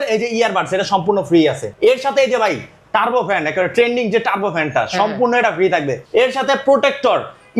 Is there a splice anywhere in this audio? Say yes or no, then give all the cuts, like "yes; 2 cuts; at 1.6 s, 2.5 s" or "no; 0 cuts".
yes; 2 cuts; at 1.7 s, 6.0 s